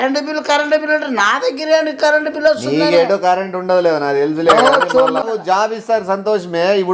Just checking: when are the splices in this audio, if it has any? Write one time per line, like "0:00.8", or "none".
0:05.3